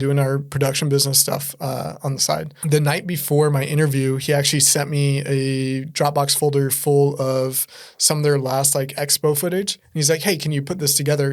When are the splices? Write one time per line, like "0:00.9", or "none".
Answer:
0:02.5